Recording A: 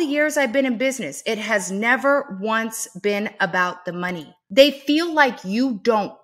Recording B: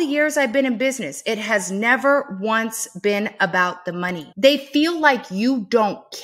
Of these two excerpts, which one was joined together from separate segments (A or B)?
B